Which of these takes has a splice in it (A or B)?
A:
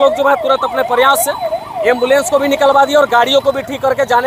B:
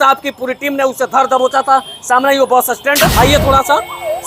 B